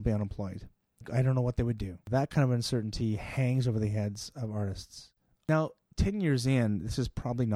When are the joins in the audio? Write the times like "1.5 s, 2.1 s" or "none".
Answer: 5.5 s

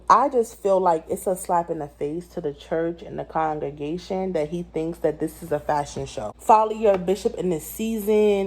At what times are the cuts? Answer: 6.0 s

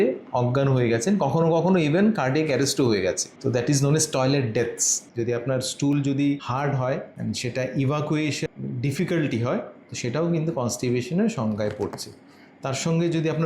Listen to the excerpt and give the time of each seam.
5.0 s, 6.4 s, 8.5 s

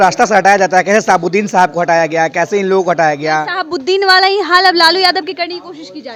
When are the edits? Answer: none

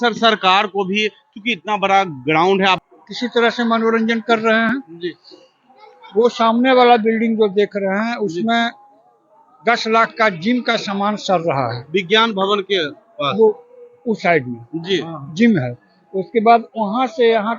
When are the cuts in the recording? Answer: 2.8 s

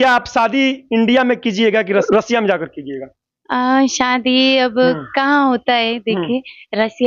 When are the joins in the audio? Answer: 2.0 s

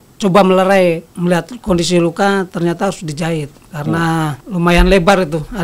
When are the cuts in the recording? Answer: 1.1 s, 4.4 s

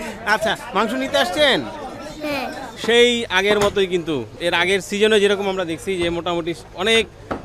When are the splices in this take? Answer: 2.7 s, 4.3 s

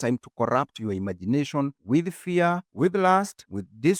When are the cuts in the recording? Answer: none

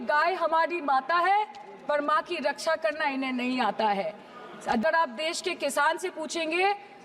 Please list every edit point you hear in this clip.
4.8 s

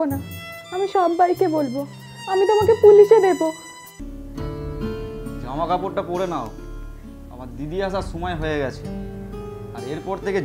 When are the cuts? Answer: 4.0 s

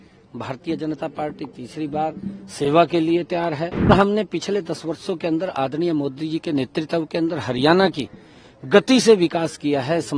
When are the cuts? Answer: 3.9 s

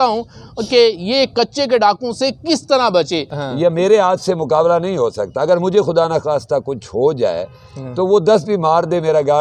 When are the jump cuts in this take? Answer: 3.3 s

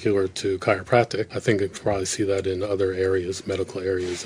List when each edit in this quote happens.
1.3 s

